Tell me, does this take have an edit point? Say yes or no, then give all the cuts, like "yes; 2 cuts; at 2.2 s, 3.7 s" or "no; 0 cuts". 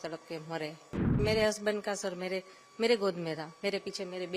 yes; 1 cut; at 1.2 s